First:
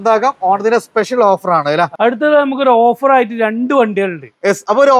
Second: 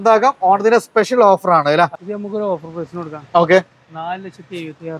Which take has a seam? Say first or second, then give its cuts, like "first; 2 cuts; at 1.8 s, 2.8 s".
second; 1 cut; at 1.9 s